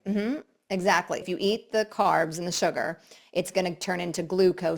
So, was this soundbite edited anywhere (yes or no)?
yes